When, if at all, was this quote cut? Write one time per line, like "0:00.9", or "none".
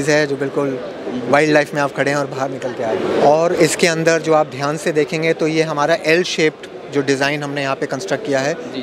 none